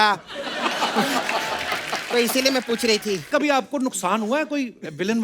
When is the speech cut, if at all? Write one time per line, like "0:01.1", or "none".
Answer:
0:03.3